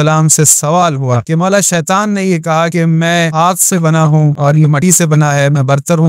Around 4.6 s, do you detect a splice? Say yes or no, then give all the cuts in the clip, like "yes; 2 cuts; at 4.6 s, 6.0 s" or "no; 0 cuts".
yes; 3 cuts; at 1.2 s, 3.0 s, 4.6 s